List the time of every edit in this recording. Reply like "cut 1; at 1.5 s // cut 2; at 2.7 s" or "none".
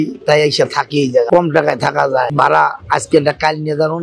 cut 1; at 2.3 s